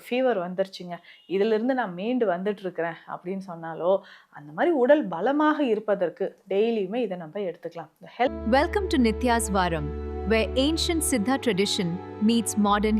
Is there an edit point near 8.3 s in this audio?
yes; 1 cut; at 8.3 s

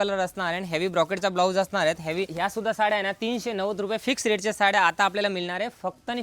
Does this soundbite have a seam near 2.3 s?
yes; 1 cut; at 2.3 s

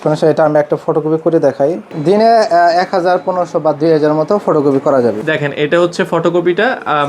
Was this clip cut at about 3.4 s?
no; 2 cuts; at 1.8 s, 5.2 s

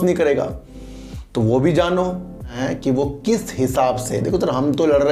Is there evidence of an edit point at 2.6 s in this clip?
yes; 1 cut; at 2.6 s

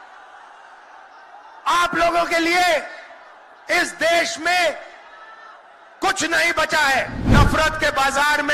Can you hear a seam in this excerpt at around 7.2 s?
yes; 1 cut; at 7.2 s

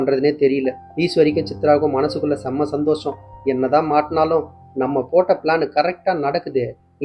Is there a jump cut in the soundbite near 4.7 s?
no; 0 cuts

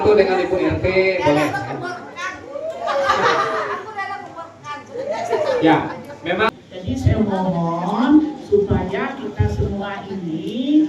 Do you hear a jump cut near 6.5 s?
yes; 1 cut; at 6.5 s

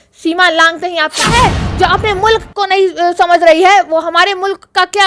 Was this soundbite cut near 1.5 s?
yes; 1 cut; at 1.5 s

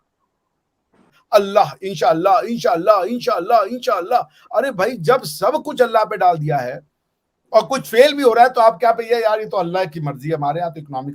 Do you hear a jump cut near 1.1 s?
yes; 1 cut; at 1.1 s

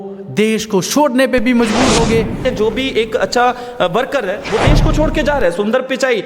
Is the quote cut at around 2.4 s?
yes; 1 cut; at 2.4 s

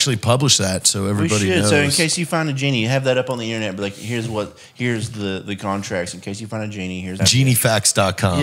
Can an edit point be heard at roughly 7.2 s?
yes; 1 cut; at 7.2 s

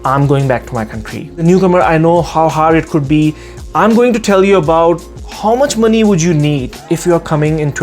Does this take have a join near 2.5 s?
no; 1 cut; at 1.1 s

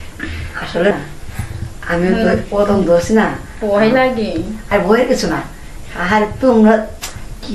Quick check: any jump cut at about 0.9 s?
yes; 1 cut; at 0.9 s

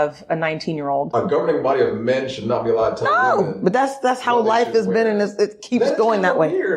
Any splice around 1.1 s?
yes; 1 cut; at 1.1 s

